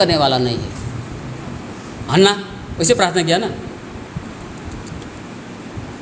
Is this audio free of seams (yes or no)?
no